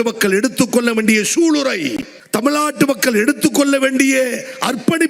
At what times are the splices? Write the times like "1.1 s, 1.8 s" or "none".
2.1 s